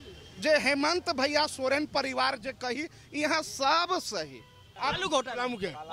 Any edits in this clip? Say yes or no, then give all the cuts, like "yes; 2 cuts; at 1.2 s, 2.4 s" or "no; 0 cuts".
yes; 1 cut; at 4.6 s